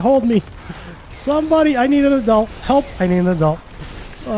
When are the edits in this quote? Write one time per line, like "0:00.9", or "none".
none

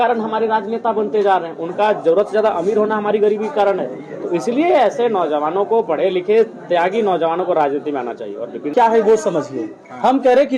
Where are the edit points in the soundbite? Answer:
0:08.7

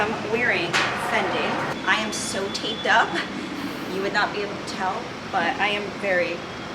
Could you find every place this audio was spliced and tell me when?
0:01.8

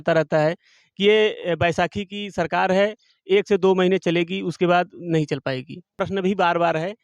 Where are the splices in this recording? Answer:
0:05.9

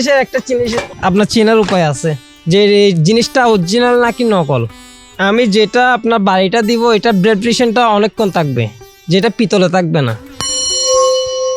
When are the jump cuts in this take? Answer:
0:00.9
0:04.9

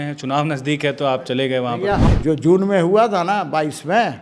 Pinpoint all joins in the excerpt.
0:02.1

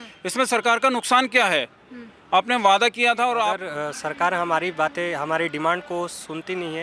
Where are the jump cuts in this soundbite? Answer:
0:03.6

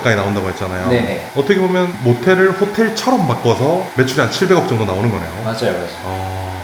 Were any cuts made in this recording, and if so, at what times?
none

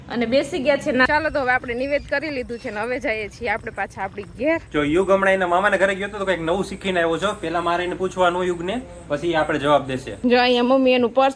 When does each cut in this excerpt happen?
0:01.1
0:04.7
0:10.0

